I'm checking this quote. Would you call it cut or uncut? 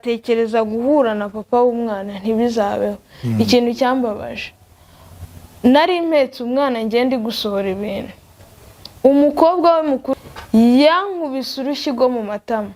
cut